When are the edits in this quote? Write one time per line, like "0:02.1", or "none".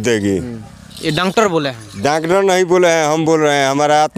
none